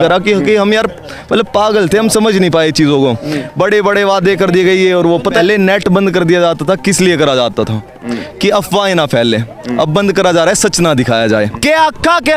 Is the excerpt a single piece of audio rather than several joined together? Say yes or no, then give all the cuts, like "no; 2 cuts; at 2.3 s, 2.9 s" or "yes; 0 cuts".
no; 2 cuts; at 5.4 s, 11.5 s